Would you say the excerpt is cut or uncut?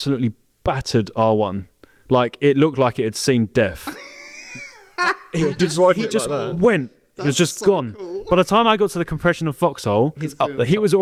uncut